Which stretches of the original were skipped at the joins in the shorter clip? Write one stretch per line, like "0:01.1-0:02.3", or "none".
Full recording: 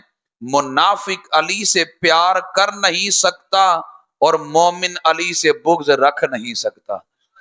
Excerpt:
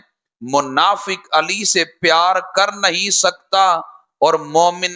none